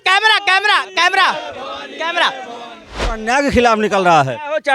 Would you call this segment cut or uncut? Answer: cut